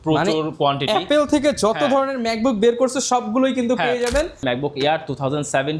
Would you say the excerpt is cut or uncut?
cut